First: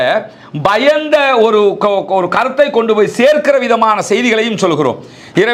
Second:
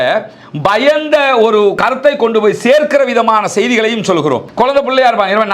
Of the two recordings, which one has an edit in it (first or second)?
second